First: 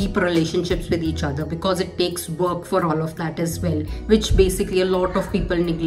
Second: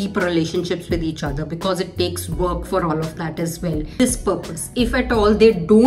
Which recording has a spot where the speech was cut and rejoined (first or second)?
second